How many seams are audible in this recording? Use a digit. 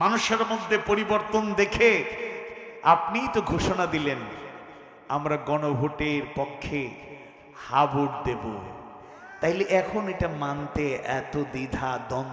0